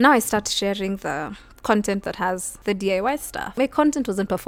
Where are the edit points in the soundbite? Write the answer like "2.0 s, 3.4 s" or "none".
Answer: none